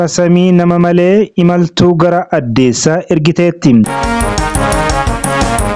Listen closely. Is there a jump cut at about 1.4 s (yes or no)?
no